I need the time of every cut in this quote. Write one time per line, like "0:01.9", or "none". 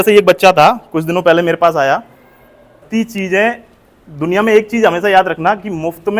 0:02.8